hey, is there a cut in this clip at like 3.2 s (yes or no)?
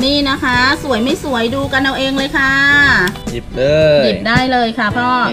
yes